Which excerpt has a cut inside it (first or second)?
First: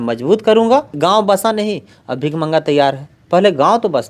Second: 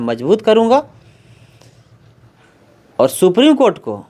first